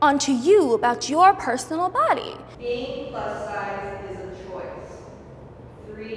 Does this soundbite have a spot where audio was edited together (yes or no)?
yes